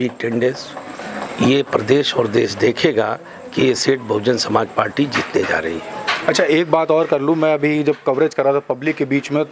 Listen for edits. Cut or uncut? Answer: uncut